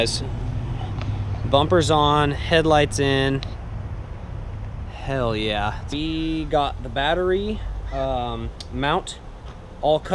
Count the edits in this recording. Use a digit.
1